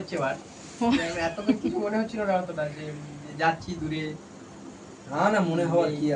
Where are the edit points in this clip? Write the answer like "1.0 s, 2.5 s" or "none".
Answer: none